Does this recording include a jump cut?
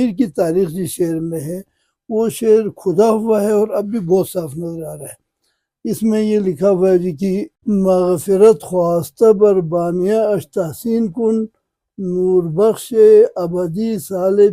no; 0 cuts

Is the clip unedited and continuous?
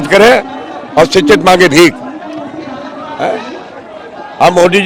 yes; 0 cuts

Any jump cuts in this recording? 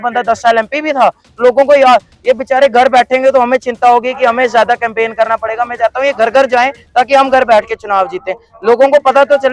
no; 0 cuts

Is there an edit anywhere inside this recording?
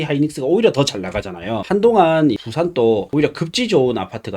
yes; 3 cuts; at 1.6 s, 2.4 s, 3.1 s

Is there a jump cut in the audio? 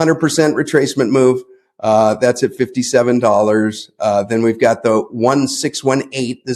no; 0 cuts

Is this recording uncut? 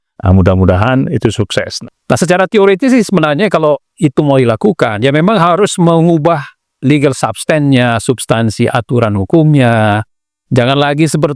no; 1 cut; at 1.7 s

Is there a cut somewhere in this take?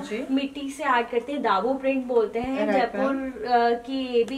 no; 0 cuts

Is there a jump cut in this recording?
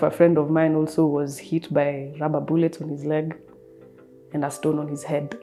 no; 0 cuts

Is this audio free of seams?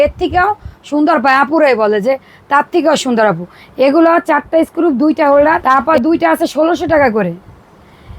no; 1 cut; at 5.6 s

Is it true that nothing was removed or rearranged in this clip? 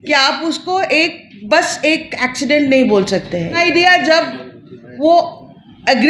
no; 1 cut; at 3.6 s

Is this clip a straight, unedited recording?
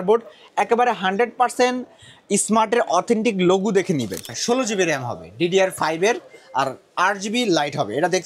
no; 1 cut; at 4.3 s

